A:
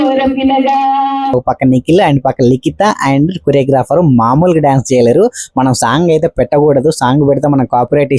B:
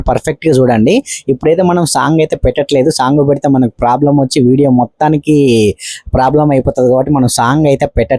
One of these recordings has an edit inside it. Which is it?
A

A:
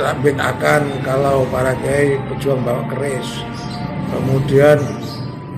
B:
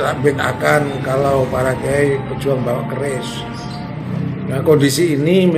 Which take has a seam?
B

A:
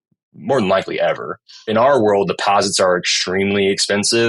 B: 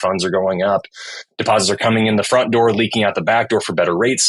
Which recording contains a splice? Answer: A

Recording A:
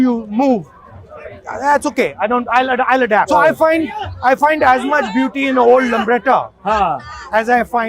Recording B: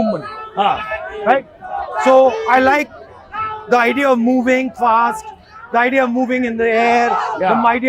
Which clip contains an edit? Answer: A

